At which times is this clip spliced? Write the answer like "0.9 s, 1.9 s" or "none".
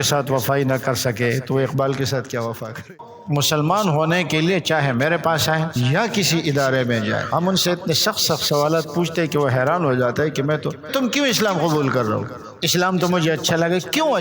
2.8 s